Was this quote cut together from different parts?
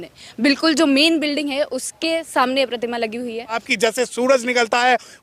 yes; 1 cut; at 3.7 s

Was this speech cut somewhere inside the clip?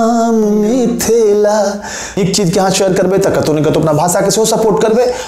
yes; 1 cut; at 2.2 s

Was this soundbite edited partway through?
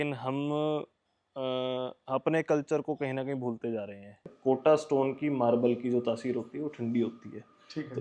yes; 1 cut; at 4.3 s

